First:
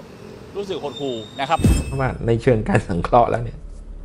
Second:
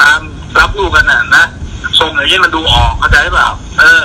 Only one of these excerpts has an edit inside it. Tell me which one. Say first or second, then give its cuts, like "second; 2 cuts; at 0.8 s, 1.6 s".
first; 1 cut; at 1.9 s